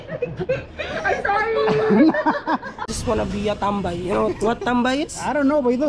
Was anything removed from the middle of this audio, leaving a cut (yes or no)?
yes